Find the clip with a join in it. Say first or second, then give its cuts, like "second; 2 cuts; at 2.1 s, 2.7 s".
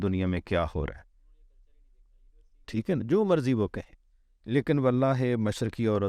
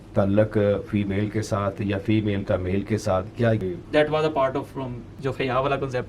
second; 2 cuts; at 3.6 s, 5.0 s